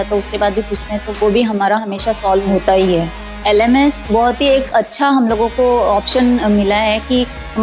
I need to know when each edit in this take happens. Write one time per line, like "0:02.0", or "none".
0:01.1
0:02.5
0:04.0